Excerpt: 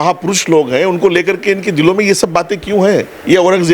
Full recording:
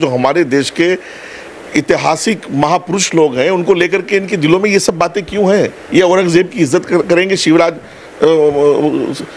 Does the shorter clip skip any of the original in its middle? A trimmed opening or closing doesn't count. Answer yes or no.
no